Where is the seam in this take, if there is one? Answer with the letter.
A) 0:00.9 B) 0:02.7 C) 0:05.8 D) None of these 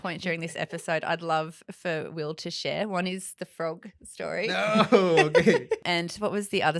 C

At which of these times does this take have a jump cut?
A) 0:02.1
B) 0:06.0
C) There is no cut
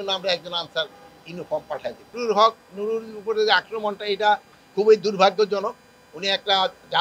A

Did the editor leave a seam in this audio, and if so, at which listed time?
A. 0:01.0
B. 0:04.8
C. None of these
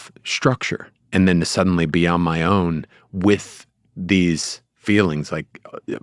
A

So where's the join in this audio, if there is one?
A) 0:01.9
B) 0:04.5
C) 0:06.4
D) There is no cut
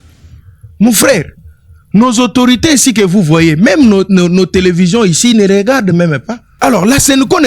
C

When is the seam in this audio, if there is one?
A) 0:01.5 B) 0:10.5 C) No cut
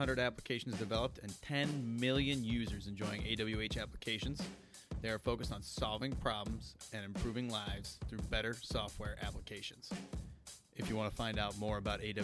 C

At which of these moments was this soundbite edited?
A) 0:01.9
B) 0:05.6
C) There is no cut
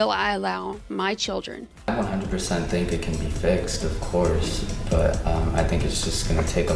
A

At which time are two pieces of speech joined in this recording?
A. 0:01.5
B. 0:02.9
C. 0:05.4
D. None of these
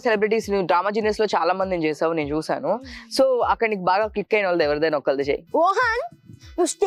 C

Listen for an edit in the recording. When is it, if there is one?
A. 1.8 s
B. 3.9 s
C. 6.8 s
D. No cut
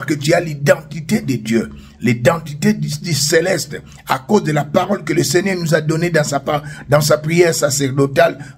D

